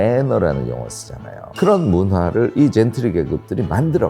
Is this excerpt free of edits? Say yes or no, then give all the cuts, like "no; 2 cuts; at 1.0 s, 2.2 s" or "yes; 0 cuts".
no; 1 cut; at 1.5 s